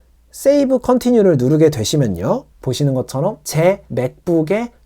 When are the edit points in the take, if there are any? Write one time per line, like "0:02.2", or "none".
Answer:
0:03.4